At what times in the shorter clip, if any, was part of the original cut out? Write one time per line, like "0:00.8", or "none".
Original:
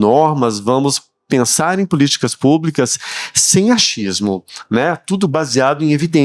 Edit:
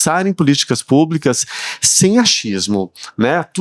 none